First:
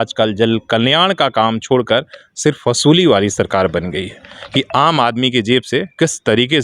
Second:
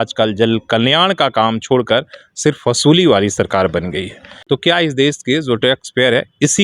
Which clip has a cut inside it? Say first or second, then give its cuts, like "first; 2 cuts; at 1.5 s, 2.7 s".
second; 1 cut; at 4.3 s